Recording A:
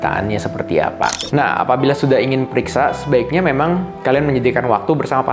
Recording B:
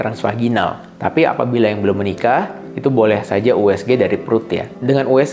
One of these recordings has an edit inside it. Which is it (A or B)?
A